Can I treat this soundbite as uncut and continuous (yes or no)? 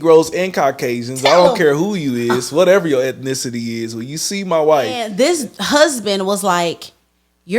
no